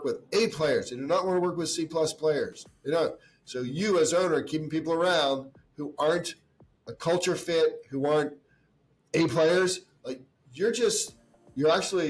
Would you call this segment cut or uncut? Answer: uncut